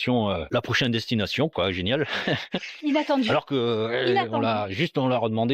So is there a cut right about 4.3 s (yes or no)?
no